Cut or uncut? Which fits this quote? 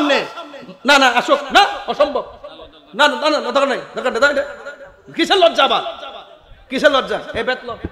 uncut